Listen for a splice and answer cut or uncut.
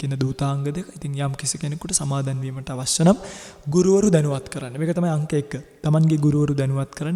uncut